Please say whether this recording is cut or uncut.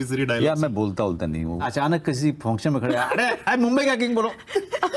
cut